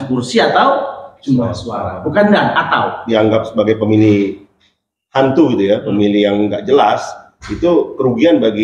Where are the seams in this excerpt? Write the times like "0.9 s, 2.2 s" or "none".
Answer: 3.0 s